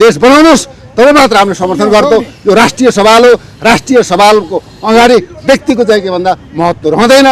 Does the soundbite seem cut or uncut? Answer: uncut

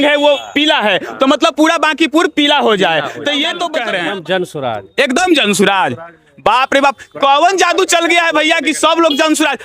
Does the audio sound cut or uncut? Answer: cut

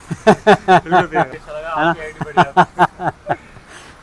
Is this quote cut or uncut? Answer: cut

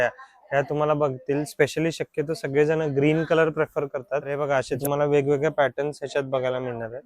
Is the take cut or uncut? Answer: cut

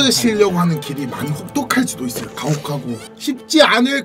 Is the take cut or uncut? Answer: cut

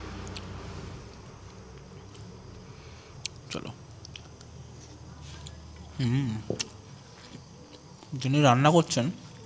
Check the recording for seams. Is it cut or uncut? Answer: uncut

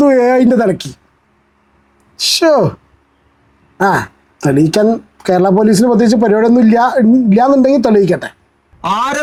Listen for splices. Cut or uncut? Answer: uncut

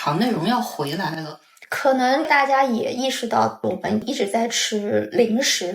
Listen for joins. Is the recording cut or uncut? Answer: cut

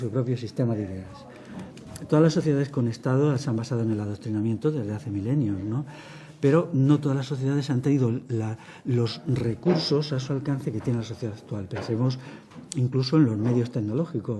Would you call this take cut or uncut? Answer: cut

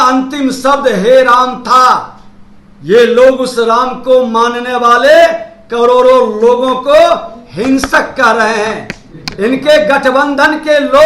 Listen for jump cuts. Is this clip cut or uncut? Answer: uncut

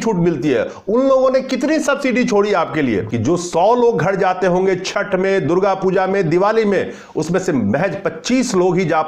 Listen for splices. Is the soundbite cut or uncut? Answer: cut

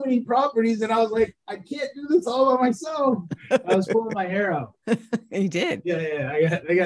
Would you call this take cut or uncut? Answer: cut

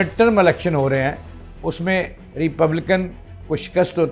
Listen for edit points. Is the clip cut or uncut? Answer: uncut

